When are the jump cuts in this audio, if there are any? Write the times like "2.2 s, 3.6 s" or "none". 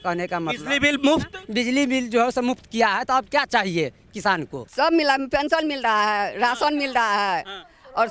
4.7 s